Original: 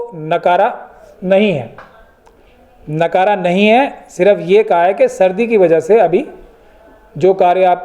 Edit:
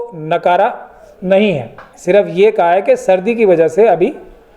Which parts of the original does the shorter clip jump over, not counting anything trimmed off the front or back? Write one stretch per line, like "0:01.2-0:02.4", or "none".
0:01.9-0:04.0